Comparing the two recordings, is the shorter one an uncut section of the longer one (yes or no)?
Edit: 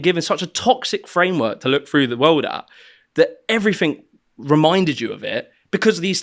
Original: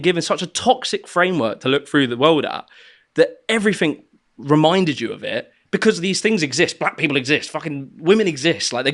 yes